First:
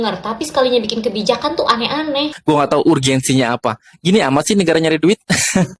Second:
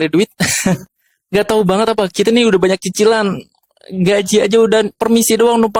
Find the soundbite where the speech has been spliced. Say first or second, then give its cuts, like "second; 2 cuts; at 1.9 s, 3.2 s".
first; 1 cut; at 2.3 s